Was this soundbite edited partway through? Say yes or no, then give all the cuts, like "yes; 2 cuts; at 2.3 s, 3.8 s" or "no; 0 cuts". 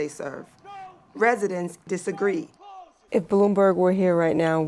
yes; 2 cuts; at 1.9 s, 2.8 s